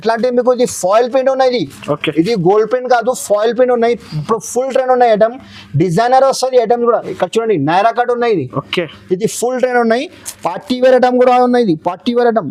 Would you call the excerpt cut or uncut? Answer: uncut